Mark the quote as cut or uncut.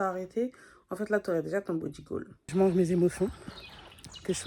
cut